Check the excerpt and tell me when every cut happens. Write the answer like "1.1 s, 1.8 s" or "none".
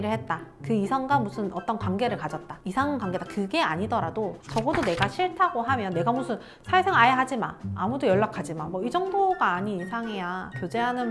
none